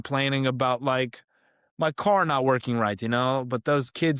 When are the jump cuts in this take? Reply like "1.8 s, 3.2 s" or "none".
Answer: none